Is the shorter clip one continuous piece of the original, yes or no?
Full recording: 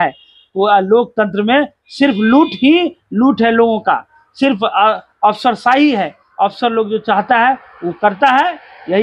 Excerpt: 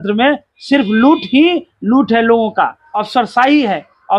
no